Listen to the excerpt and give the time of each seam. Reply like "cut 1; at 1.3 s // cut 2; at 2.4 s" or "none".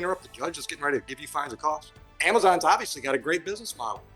cut 1; at 2.1 s

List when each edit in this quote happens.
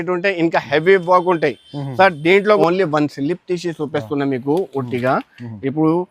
cut 1; at 2.6 s

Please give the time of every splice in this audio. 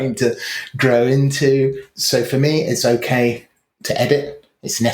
cut 1; at 1.9 s

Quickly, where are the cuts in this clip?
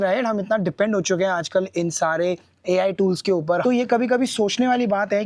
cut 1; at 3.6 s

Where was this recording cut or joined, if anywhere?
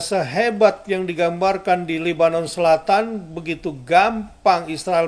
none

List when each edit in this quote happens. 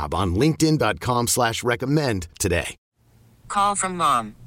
cut 1; at 2.8 s

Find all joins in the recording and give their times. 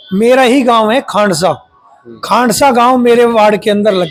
none

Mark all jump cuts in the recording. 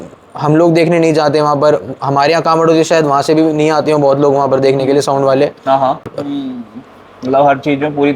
cut 1; at 6.0 s

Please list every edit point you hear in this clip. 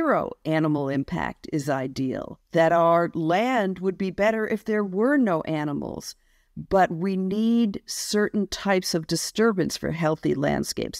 cut 1; at 2.3 s

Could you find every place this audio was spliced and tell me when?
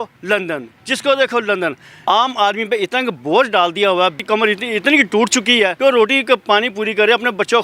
cut 1; at 1.9 s // cut 2; at 4.2 s // cut 3; at 5.7 s

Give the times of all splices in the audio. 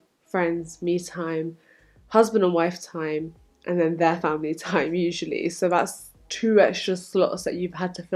none

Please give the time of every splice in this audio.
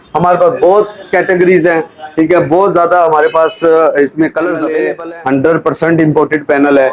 cut 1; at 4.8 s

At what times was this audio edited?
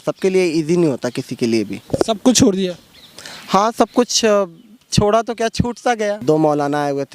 cut 1; at 6.2 s

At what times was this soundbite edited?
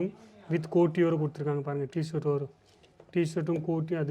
none

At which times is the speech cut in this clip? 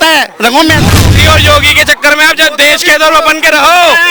cut 1; at 1.1 s

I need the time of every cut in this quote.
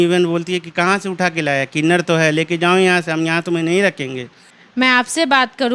none

